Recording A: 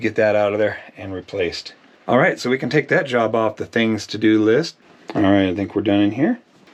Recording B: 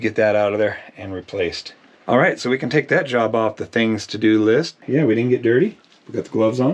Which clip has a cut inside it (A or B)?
B